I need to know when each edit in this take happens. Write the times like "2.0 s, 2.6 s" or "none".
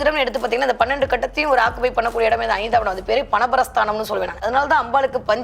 4.4 s